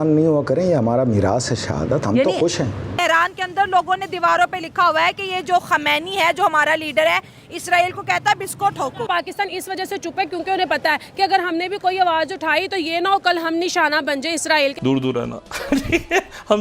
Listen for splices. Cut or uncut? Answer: cut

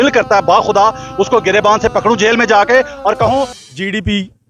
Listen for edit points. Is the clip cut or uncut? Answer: cut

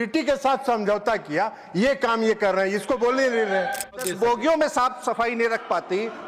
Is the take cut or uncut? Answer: cut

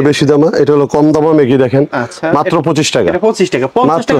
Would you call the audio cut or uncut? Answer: uncut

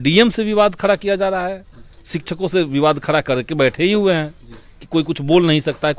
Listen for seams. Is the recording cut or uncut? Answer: uncut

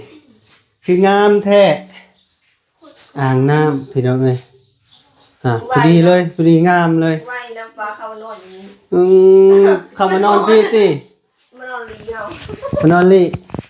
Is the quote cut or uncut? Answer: uncut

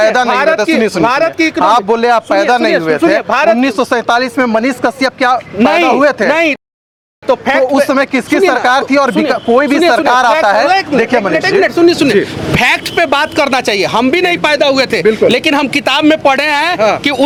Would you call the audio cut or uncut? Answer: uncut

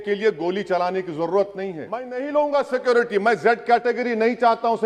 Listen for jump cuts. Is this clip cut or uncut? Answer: cut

